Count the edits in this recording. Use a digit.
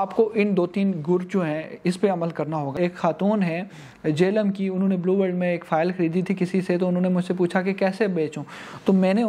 1